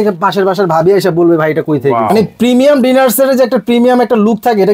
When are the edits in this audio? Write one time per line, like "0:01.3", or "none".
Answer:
0:02.3